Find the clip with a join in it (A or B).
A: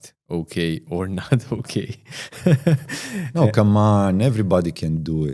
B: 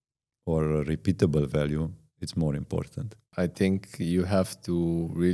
B